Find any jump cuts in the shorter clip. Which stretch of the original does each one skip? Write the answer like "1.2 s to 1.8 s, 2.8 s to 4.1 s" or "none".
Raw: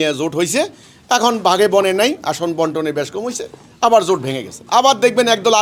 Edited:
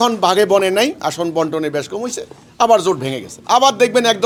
none